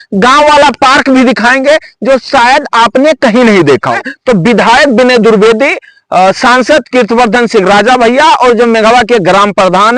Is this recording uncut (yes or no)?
no